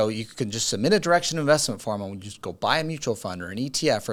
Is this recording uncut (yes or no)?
yes